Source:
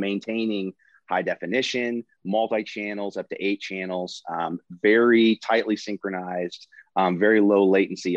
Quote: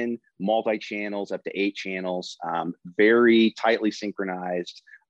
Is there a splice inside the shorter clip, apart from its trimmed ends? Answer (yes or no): no